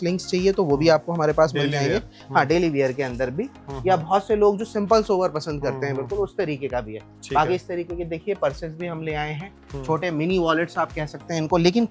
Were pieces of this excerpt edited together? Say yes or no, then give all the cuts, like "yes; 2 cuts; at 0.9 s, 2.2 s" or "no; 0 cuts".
no; 0 cuts